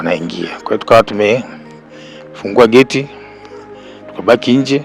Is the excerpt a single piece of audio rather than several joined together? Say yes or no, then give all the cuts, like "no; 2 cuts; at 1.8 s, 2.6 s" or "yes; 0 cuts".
yes; 0 cuts